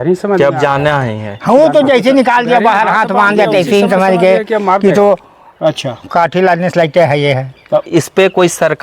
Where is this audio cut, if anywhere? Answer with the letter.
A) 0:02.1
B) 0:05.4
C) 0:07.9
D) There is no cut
C